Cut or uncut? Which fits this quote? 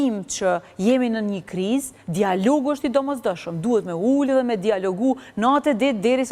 uncut